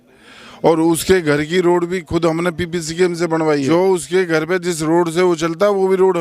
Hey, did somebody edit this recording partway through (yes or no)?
yes